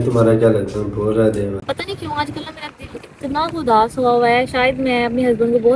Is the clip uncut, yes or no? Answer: no